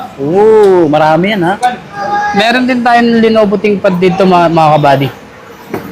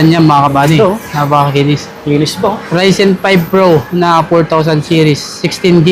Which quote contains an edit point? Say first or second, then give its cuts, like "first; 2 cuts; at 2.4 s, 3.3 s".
first; 1 cut; at 2.0 s